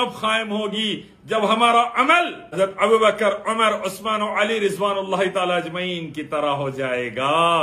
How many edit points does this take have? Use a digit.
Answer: 1